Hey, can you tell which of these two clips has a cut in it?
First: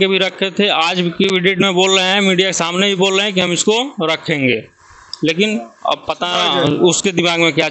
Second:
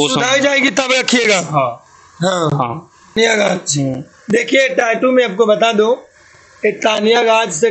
second; 1 cut; at 3.1 s

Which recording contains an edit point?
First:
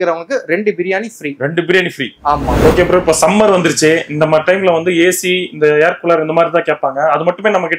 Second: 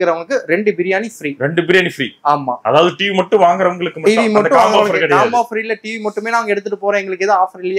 first; 1 cut; at 2.6 s

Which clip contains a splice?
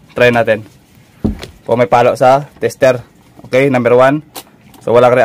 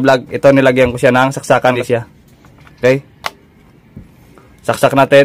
second; 1 cut; at 1.8 s

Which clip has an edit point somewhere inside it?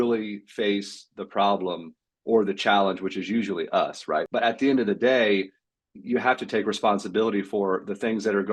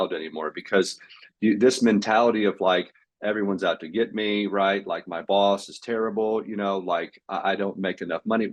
first; 1 cut; at 4.3 s

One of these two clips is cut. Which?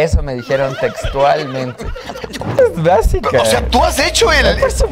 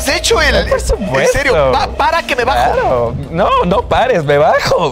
first; 1 cut; at 2.6 s

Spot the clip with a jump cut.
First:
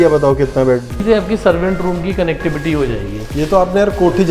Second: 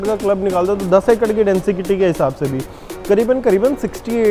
first; 1 cut; at 1.0 s

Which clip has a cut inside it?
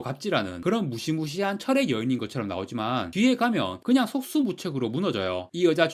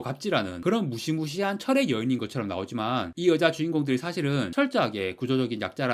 second; 1 cut; at 3.1 s

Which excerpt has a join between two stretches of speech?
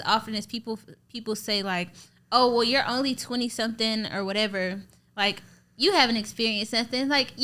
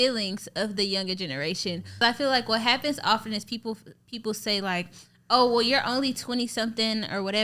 second; 1 cut; at 2.0 s

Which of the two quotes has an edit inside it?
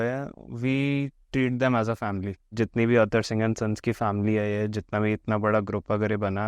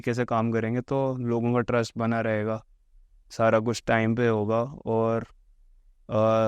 first; 1 cut; at 2.5 s

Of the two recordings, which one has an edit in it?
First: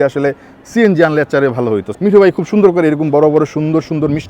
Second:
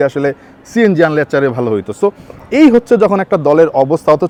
first; 1 cut; at 1.9 s

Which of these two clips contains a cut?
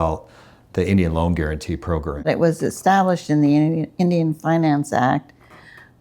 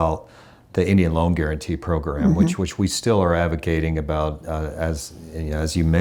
first; 1 cut; at 2.2 s

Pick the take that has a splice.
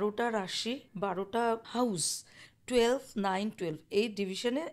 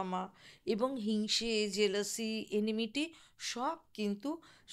first; 2 cuts; at 0.9 s, 1.7 s

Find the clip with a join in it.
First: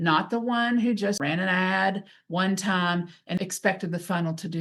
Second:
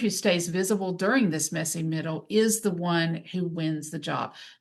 first; 2 cuts; at 1.2 s, 3.4 s

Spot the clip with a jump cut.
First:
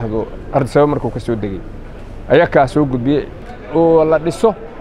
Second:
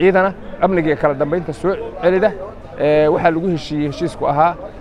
first; 1 cut; at 3.3 s

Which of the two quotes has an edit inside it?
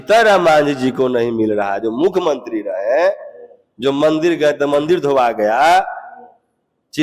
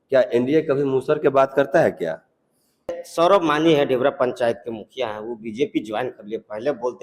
second; 1 cut; at 3.0 s

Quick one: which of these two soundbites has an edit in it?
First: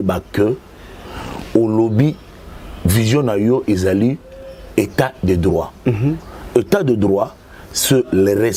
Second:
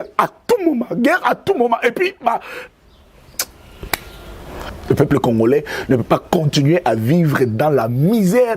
second; 1 cut; at 4.7 s

